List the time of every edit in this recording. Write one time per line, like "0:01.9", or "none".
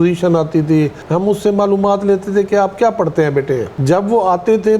0:01.0
0:03.7